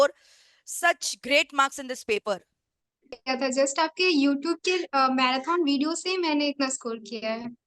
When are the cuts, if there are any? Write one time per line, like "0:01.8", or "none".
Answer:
0:03.2